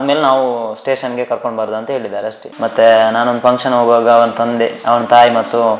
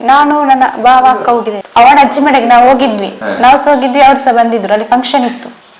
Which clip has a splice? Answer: first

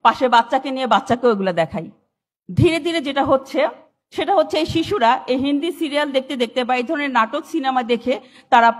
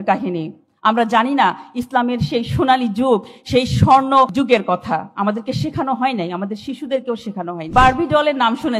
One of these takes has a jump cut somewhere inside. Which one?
second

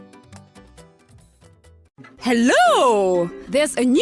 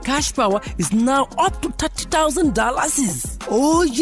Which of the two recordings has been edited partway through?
first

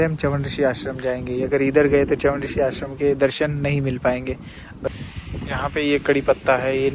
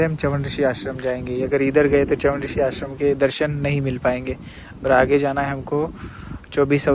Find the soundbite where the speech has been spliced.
first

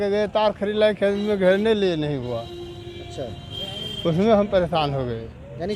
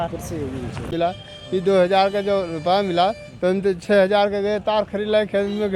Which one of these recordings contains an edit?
second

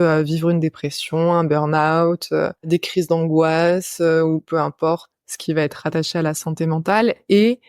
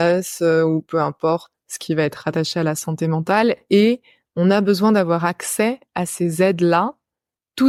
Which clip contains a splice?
first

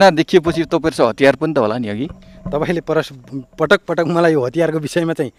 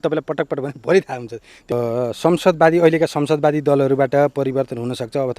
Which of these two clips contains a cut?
second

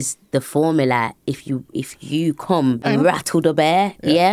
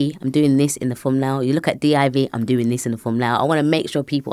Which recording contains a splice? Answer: first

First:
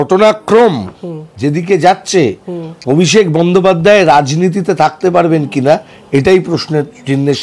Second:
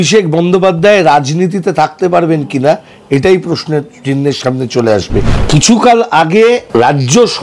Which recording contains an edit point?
second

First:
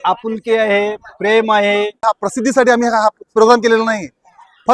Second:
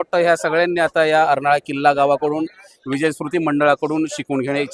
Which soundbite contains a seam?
first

